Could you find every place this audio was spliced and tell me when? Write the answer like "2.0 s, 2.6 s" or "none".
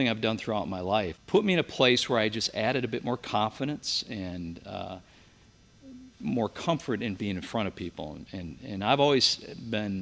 1.2 s